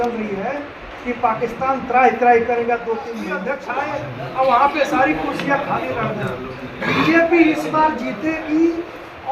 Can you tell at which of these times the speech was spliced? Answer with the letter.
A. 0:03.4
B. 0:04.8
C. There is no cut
A